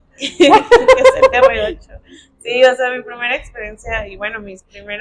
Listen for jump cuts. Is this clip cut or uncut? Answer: uncut